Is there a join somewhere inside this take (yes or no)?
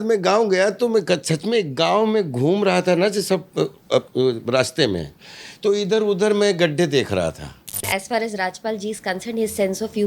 yes